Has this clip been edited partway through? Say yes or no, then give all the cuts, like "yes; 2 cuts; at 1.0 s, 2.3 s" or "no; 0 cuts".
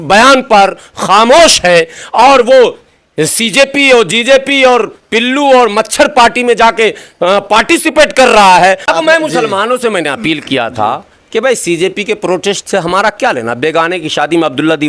yes; 1 cut; at 8.8 s